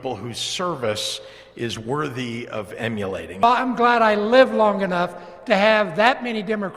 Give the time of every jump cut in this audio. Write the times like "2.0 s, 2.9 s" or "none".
3.3 s

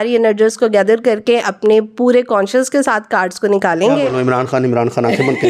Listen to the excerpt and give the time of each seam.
none

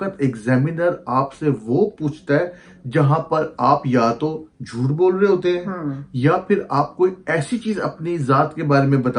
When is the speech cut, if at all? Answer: none

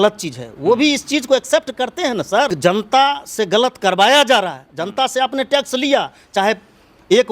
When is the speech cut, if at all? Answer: 2.5 s

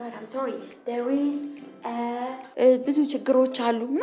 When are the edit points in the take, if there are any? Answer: 2.4 s

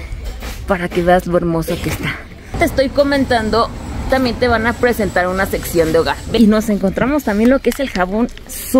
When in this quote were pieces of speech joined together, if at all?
2.6 s, 6.4 s

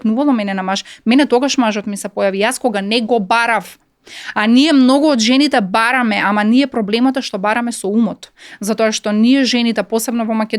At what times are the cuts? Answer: none

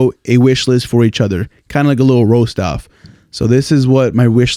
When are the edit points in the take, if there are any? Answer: none

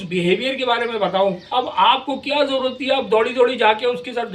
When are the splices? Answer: 1.4 s

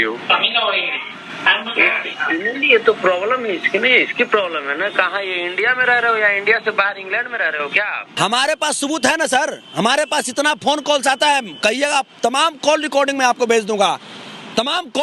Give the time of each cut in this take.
8.1 s

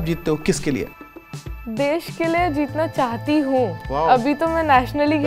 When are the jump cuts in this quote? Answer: 1.0 s

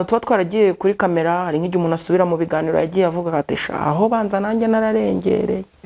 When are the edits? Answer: none

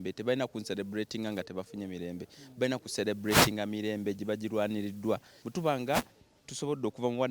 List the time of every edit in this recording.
5.4 s

